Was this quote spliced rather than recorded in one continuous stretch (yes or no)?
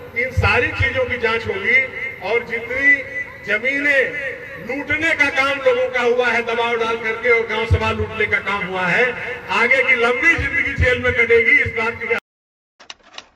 yes